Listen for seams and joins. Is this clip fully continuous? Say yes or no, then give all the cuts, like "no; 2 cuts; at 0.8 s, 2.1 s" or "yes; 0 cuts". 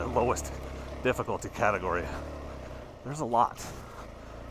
yes; 0 cuts